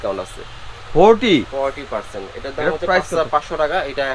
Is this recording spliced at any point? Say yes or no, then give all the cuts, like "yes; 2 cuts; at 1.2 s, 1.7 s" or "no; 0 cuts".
no; 0 cuts